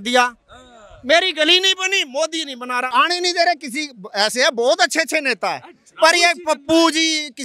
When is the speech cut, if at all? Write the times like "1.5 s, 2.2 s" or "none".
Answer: 2.8 s